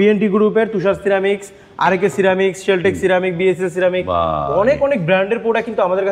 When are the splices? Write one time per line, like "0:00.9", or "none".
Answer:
none